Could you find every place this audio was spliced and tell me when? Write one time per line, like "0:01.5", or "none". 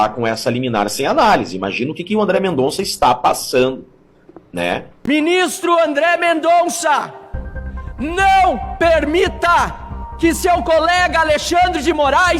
0:04.9